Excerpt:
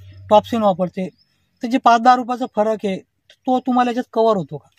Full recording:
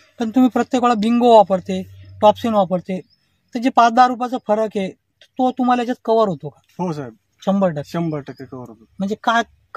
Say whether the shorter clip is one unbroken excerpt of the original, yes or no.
yes